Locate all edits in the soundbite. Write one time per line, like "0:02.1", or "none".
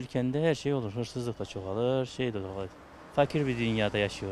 none